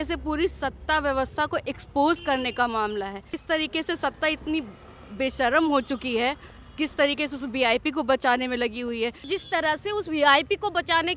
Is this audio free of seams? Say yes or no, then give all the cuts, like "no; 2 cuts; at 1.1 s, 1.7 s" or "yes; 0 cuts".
no; 2 cuts; at 3.3 s, 9.2 s